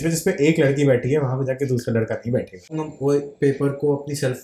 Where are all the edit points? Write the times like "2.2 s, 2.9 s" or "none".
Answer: 2.7 s